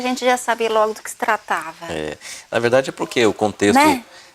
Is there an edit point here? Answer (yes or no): no